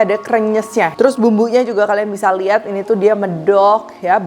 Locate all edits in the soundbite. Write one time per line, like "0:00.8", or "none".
0:00.9

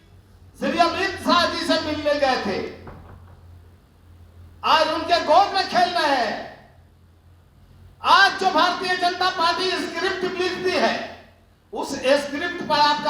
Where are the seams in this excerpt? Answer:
none

